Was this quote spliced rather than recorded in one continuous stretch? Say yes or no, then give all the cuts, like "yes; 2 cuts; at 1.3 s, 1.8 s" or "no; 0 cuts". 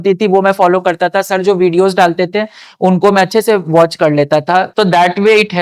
yes; 1 cut; at 4.7 s